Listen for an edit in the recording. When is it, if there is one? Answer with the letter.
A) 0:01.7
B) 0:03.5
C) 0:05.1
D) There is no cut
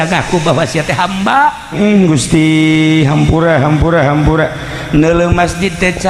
A